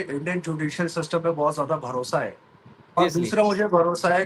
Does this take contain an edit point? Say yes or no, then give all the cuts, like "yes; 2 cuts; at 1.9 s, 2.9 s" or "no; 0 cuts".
no; 0 cuts